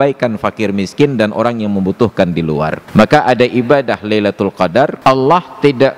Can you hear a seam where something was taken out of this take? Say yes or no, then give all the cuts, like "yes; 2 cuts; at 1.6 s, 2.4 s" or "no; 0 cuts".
yes; 2 cuts; at 2.8 s, 5.0 s